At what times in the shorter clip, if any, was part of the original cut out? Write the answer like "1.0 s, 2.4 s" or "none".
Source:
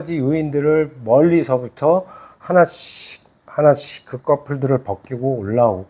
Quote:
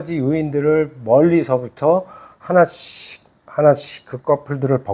none